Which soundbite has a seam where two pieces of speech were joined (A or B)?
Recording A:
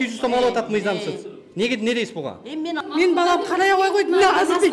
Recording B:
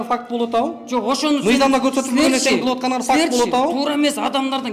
A